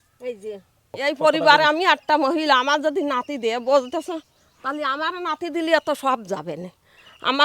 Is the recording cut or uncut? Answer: cut